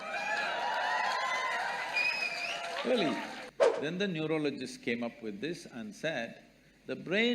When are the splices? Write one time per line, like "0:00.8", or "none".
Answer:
0:03.4